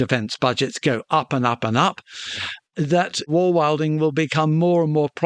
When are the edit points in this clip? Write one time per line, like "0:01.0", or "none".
0:03.3